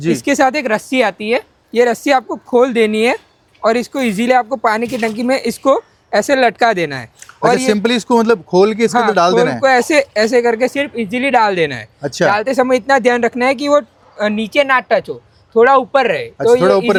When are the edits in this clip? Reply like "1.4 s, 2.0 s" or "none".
none